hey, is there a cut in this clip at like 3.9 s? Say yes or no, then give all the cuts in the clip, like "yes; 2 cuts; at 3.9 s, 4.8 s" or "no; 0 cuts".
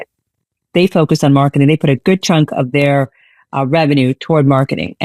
no; 0 cuts